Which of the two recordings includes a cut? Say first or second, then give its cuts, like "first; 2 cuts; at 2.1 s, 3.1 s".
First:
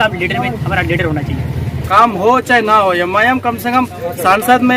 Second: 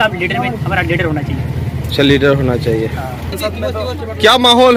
first; 1 cut; at 1.8 s